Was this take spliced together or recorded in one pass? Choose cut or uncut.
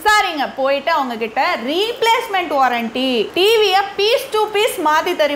uncut